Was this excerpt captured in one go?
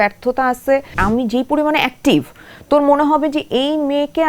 no; 1 cut; at 0.9 s

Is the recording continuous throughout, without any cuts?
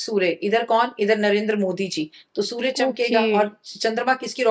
yes; 0 cuts

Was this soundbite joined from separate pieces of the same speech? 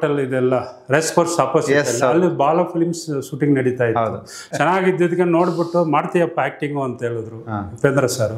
yes; 1 cut; at 4.4 s

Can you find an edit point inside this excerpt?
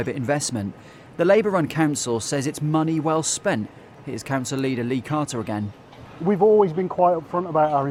no; 0 cuts

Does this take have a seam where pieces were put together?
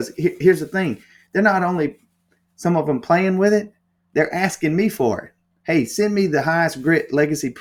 no; 0 cuts

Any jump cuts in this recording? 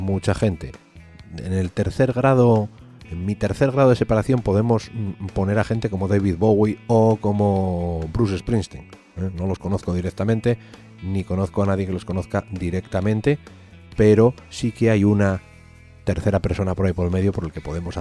yes; 1 cut; at 13.5 s

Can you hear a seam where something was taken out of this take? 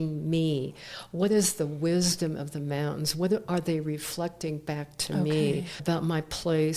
yes; 1 cut; at 5.7 s

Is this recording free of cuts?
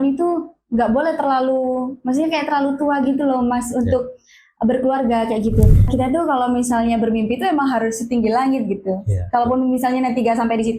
no; 1 cut; at 5.8 s

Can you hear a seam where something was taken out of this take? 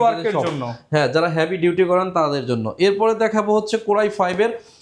no; 0 cuts

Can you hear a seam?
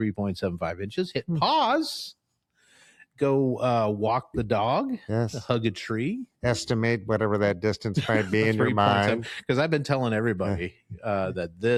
no; 0 cuts

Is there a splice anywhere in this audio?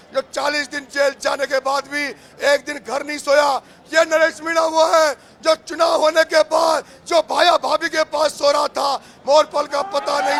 no; 0 cuts

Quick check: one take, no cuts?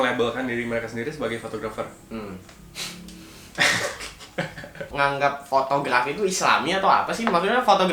no; 1 cut; at 4.8 s

